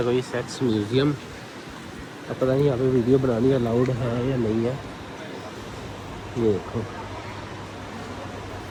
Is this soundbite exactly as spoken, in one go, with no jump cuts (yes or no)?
yes